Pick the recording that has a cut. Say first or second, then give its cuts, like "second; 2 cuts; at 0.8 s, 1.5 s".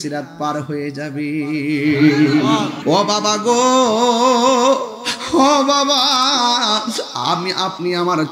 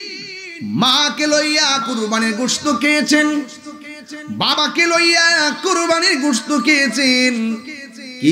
first; 1 cut; at 2.8 s